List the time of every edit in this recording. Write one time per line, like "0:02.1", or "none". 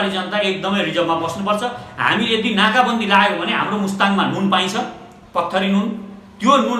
none